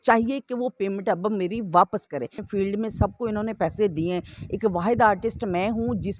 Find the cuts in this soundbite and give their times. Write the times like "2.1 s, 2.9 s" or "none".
2.4 s